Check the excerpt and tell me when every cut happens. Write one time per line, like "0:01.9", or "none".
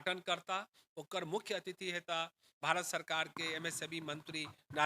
none